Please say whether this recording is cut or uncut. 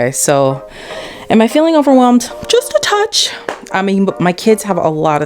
uncut